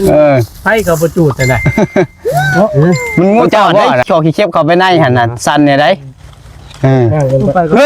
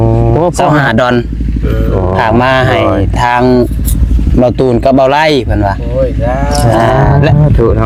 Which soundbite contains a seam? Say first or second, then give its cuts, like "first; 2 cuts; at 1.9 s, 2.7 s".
first; 1 cut; at 2.5 s